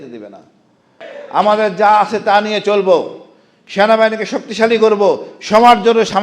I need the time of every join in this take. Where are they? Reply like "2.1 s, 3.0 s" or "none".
1.1 s